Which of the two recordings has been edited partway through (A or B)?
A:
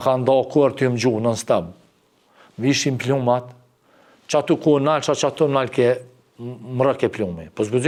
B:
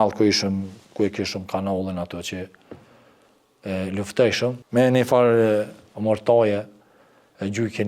B